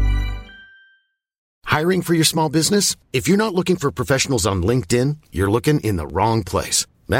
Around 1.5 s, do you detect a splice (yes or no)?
yes